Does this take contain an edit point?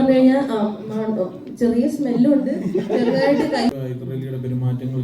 yes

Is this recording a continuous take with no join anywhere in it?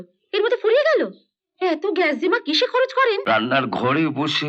no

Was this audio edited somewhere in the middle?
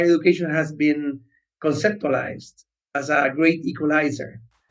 no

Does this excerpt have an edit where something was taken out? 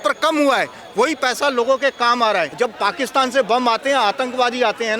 yes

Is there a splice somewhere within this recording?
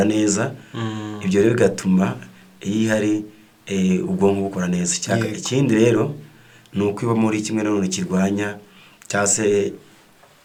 no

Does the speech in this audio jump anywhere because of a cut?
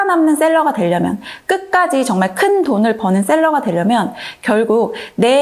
no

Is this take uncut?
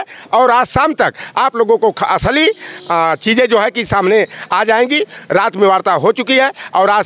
yes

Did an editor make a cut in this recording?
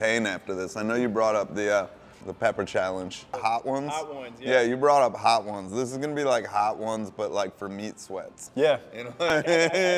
yes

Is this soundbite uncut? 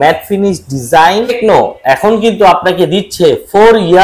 no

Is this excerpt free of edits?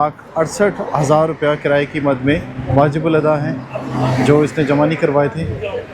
yes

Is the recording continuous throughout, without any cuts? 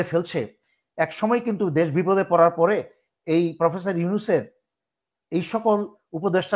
yes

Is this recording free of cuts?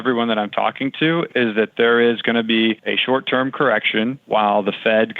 no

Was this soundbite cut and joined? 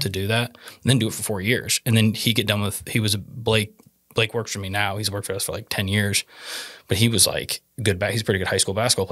no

